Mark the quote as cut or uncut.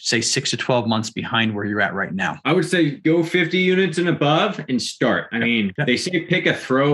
cut